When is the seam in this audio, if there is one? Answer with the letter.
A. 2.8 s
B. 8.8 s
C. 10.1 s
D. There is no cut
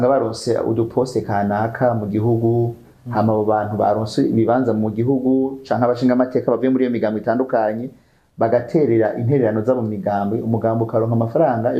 D